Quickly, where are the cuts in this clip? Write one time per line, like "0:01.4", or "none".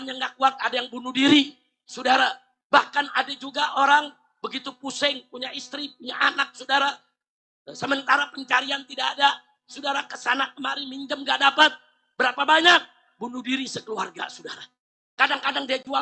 0:02.5